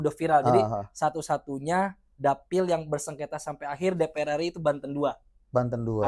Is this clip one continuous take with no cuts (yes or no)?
yes